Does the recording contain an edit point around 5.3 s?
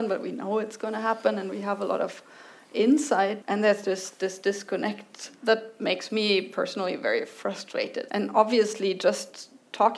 yes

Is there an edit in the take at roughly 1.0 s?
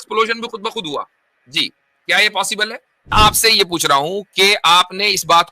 no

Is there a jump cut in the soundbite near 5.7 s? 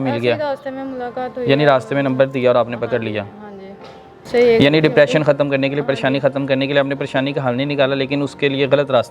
no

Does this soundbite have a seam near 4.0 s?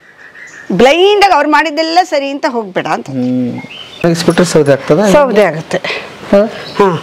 yes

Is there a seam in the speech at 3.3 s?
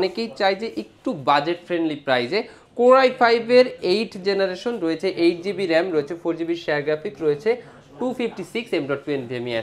no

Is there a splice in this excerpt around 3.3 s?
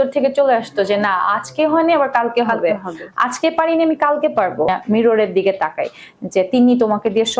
no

